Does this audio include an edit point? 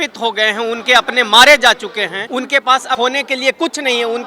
yes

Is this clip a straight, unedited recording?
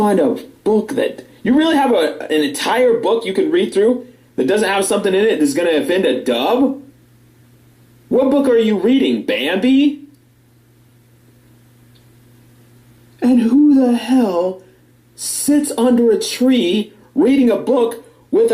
no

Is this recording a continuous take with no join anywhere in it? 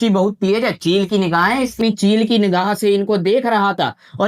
no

